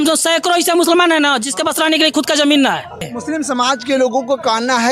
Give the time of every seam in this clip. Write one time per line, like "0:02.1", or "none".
0:03.1